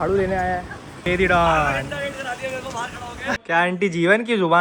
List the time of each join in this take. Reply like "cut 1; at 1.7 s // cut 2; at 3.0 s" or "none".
cut 1; at 1.0 s // cut 2; at 3.4 s